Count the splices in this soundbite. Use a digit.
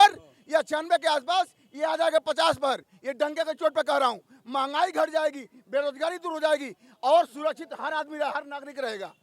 0